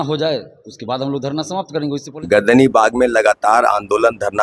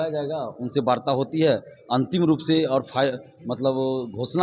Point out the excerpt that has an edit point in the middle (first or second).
first